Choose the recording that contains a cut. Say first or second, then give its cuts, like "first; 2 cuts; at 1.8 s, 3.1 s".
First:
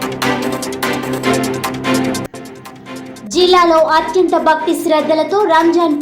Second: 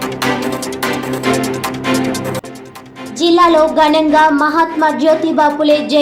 first; 1 cut; at 2.2 s